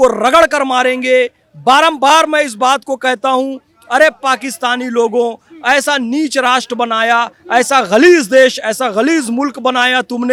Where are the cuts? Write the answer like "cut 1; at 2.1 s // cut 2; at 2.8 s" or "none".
none